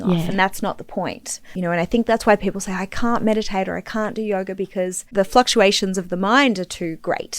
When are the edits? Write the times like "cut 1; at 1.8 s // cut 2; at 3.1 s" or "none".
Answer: cut 1; at 1.4 s // cut 2; at 5.1 s